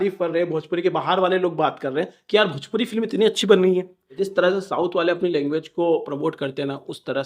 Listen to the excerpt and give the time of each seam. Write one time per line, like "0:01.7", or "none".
0:04.2